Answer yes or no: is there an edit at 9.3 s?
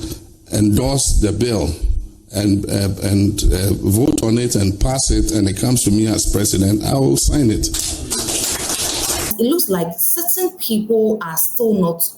yes